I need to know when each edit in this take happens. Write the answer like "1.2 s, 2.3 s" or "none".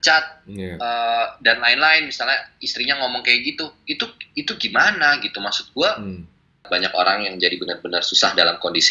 6.7 s